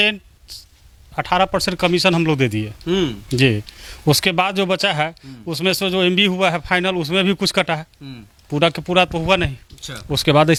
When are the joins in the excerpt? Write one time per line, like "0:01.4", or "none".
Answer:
none